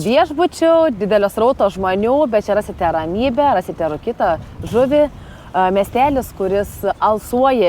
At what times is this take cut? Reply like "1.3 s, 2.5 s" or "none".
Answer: none